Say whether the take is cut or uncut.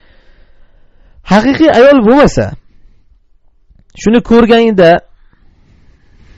cut